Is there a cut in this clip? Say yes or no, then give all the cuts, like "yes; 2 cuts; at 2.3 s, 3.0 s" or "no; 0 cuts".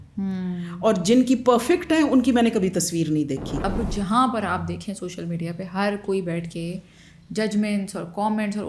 yes; 1 cut; at 3.5 s